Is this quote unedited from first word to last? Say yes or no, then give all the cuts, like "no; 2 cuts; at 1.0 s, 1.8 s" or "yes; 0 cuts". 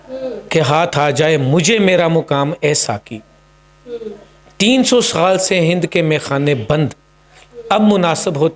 yes; 0 cuts